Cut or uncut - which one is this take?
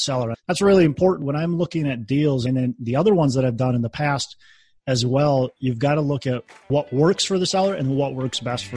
uncut